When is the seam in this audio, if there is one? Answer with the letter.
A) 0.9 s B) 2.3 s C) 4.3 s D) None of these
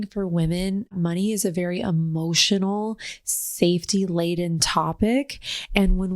A